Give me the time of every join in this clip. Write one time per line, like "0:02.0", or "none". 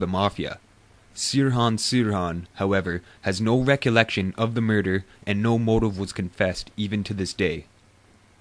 none